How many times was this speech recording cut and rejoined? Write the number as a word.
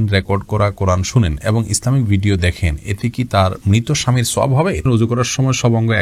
one